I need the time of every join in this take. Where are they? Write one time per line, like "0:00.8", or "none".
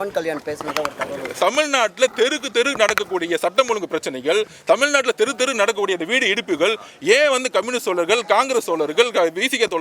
0:01.4